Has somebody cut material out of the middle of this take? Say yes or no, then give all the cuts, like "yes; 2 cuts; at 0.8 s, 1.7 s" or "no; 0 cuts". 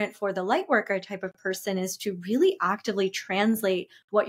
no; 0 cuts